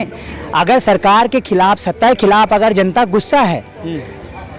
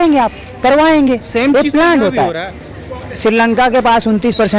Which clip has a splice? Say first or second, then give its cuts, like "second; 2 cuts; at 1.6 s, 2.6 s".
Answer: second; 1 cut; at 2.5 s